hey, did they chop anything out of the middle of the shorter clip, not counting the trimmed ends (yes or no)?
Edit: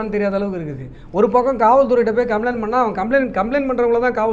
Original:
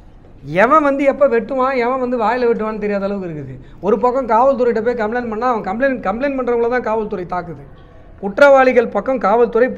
no